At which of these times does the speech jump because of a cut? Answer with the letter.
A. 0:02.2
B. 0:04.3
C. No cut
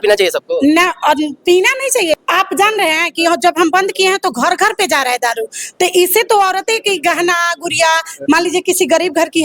A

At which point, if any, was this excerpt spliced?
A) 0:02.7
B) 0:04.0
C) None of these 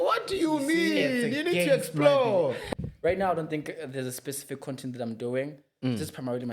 A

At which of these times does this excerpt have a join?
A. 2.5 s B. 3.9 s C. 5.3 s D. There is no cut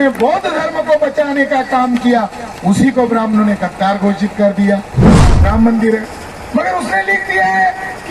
C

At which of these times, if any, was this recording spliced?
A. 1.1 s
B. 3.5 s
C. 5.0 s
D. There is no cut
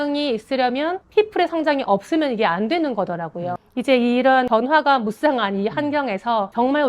B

